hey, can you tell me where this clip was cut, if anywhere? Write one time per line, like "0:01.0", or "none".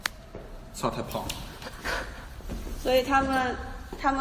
0:01.5